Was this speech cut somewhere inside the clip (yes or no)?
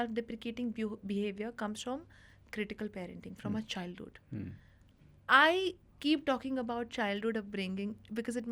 no